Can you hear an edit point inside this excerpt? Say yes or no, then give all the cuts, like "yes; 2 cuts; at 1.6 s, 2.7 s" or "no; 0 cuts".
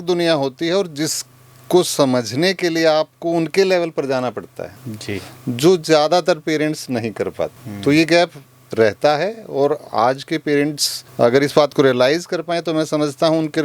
no; 0 cuts